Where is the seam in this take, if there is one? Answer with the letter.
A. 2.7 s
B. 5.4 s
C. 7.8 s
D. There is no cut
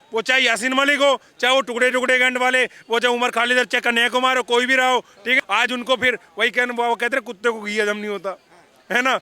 B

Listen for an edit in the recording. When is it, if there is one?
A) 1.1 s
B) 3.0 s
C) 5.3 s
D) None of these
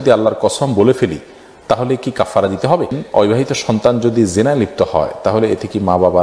B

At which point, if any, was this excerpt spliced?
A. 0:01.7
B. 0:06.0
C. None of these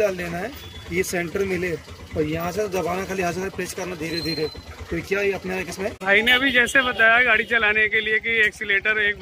B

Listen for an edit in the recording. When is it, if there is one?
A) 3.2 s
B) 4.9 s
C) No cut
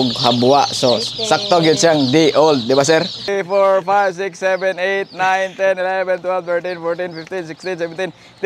A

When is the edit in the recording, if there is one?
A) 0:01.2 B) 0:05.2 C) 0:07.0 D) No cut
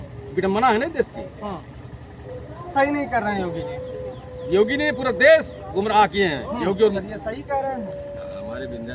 C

